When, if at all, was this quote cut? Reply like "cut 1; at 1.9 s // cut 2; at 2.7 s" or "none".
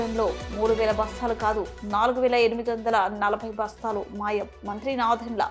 none